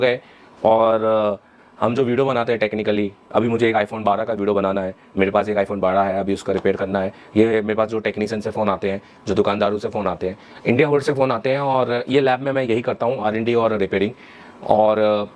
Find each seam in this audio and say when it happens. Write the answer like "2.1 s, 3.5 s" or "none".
none